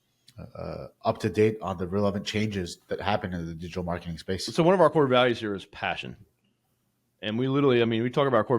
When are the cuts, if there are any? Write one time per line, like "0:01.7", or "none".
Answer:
0:04.5